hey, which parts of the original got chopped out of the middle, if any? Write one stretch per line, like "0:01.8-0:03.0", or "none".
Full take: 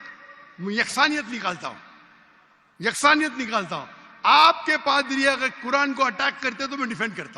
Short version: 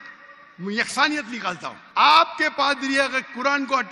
0:01.7-0:04.0